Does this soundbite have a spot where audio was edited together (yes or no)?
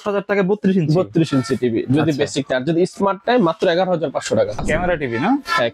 yes